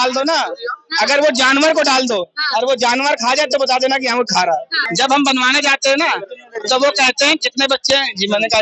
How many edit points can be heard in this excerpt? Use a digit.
1